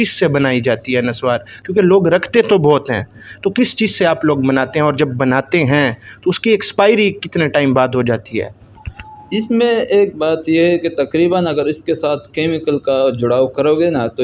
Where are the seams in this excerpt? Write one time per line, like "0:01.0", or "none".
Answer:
none